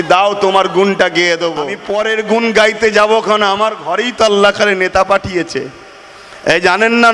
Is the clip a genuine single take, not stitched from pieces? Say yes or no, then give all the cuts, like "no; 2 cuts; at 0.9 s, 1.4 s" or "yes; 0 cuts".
no; 1 cut; at 1.8 s